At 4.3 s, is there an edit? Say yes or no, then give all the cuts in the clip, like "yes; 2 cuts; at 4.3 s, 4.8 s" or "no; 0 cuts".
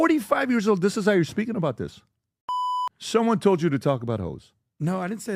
no; 1 cut; at 2.5 s